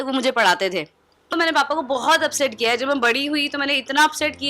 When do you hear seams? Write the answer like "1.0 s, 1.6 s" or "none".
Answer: 1.3 s